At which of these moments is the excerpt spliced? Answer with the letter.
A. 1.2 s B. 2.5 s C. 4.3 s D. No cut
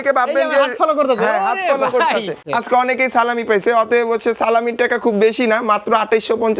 B